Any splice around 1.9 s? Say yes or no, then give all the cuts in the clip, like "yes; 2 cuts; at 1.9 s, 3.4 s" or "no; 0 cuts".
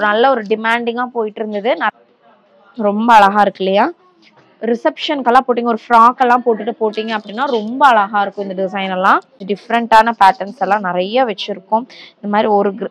yes; 2 cuts; at 1.9 s, 9.4 s